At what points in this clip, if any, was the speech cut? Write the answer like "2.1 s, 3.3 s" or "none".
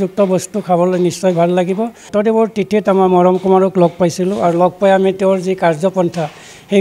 2.0 s